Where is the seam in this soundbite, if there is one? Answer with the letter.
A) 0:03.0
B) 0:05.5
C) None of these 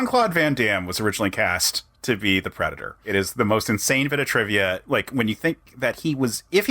A